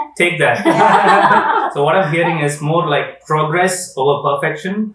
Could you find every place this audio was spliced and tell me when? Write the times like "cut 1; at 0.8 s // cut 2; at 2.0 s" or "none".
cut 1; at 1.7 s